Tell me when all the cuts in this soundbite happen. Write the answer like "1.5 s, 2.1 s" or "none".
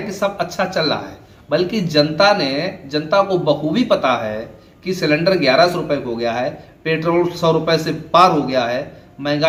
none